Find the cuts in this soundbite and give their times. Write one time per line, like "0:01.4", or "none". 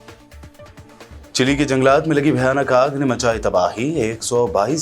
0:01.1